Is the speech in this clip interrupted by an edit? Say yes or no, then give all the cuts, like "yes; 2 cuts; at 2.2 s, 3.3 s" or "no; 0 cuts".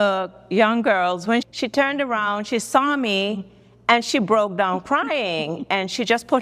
yes; 1 cut; at 1.5 s